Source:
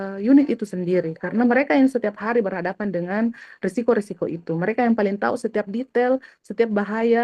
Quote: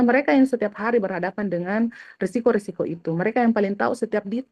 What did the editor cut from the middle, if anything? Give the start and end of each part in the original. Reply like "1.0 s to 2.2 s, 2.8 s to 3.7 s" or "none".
none